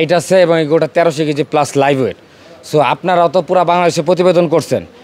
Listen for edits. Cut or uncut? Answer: uncut